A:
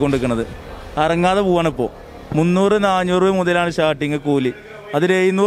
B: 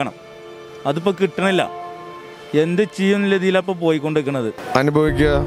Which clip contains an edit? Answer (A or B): B